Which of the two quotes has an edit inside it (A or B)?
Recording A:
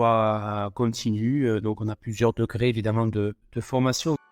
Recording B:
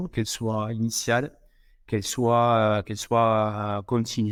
A